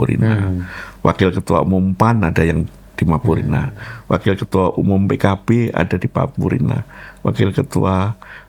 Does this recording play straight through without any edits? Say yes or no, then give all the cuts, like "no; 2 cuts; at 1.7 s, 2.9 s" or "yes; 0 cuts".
yes; 0 cuts